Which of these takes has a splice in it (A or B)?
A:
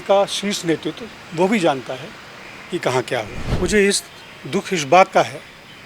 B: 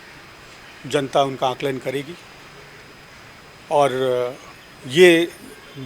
A